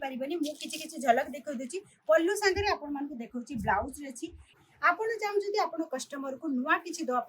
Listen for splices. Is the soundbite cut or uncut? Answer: cut